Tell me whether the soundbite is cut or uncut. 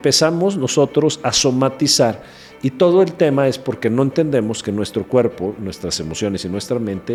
uncut